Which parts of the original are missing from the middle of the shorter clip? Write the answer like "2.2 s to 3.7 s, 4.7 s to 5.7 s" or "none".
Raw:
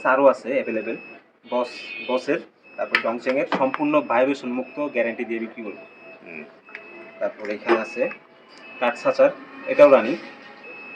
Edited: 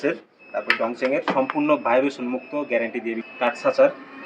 5.5 s to 8.7 s